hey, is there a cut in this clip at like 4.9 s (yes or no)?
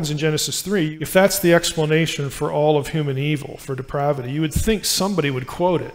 no